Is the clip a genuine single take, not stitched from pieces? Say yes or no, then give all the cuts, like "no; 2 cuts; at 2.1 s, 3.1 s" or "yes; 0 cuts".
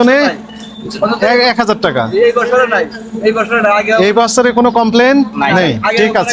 yes; 0 cuts